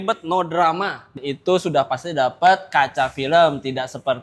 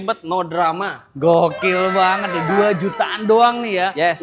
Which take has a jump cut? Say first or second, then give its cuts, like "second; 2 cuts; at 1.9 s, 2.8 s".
first; 1 cut; at 1.1 s